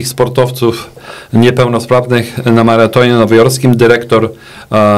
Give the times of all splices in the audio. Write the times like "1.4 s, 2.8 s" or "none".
none